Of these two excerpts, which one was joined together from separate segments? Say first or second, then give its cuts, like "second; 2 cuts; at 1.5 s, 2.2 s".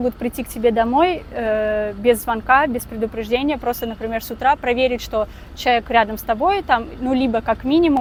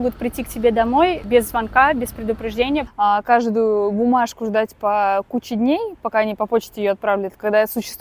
second; 2 cuts; at 1.2 s, 2.9 s